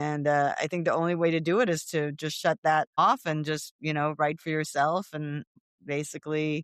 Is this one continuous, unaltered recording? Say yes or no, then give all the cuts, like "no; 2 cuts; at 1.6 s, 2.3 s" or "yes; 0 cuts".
no; 1 cut; at 5.6 s